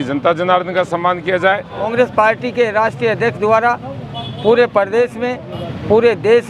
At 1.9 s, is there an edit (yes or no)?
yes